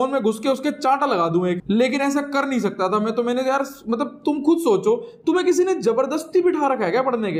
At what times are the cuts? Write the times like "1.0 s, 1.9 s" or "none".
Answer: none

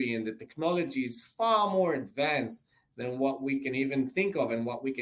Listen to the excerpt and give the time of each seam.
none

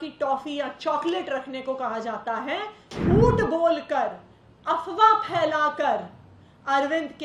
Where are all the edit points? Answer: 2.9 s

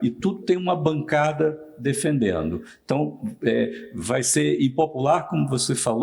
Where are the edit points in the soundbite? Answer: none

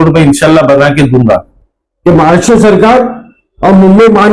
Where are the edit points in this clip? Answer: 1.6 s

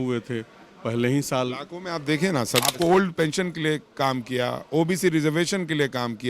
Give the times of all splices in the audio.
2.7 s

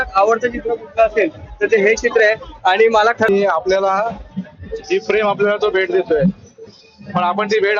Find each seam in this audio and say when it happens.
3.3 s

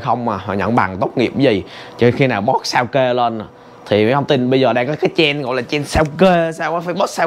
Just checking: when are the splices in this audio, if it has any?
none

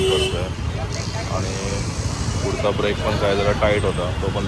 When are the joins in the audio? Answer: none

